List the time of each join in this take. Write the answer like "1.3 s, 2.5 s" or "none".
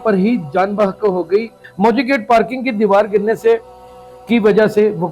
1.6 s